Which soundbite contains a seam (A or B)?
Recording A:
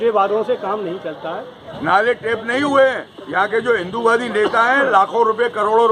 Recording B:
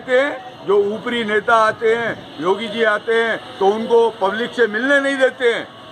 A